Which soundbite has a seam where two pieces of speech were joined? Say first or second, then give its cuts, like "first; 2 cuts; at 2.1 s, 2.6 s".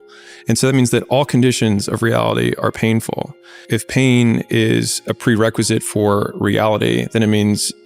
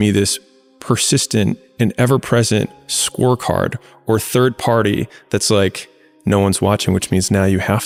first; 1 cut; at 3.6 s